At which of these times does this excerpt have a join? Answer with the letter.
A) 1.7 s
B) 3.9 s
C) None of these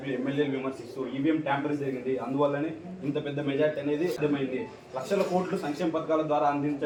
C